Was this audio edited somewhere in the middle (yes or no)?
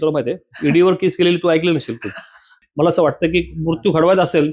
yes